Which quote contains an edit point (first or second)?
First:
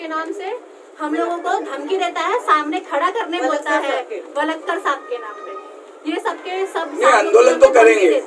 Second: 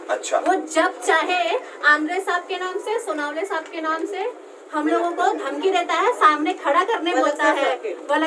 first